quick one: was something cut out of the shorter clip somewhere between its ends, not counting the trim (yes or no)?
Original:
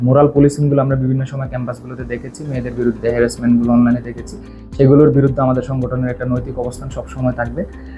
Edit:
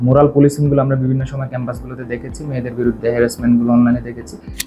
no